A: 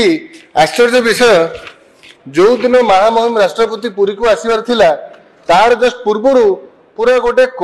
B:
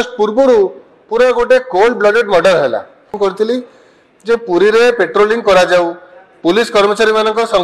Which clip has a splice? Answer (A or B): B